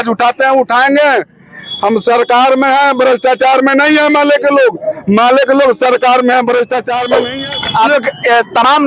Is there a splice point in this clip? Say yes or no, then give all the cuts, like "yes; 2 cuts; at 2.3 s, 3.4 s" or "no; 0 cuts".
yes; 1 cut; at 7.1 s